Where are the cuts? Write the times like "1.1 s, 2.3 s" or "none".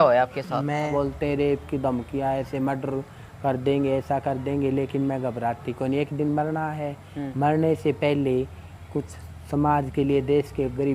0.9 s